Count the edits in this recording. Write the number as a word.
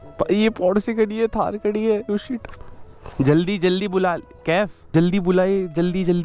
zero